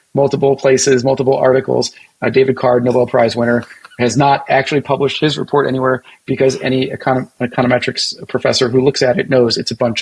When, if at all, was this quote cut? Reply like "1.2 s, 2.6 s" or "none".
none